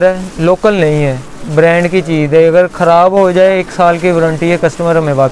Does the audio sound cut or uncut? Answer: uncut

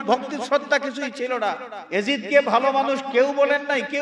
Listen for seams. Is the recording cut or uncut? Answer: cut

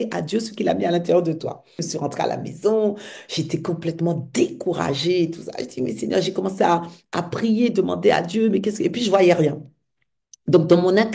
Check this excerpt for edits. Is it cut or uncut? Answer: cut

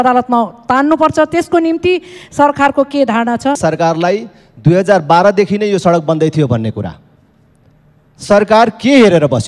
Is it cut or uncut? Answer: cut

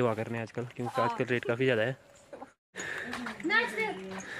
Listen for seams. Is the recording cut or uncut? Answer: cut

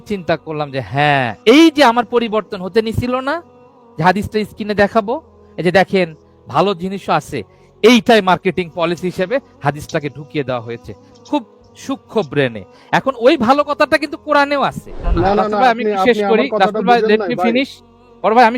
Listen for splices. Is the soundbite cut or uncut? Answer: cut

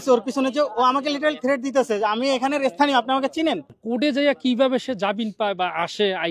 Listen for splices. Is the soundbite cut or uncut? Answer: cut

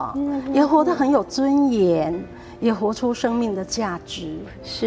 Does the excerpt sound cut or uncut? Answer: uncut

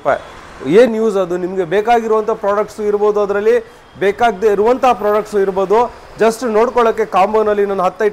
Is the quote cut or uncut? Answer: uncut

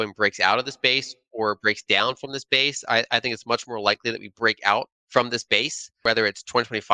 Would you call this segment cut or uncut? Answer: cut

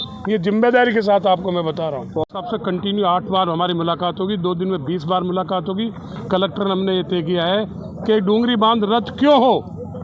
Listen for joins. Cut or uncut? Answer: cut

